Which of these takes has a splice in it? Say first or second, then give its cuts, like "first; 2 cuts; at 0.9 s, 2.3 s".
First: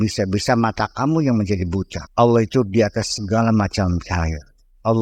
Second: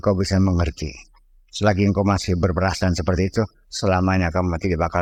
first; 1 cut; at 2.0 s